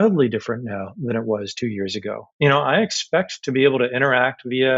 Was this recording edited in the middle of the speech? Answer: yes; 1 cut; at 2.2 s

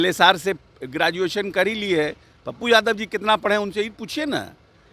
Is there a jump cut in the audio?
no; 0 cuts

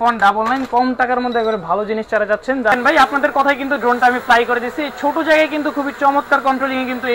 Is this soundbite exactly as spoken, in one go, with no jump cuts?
no; 1 cut; at 2.7 s

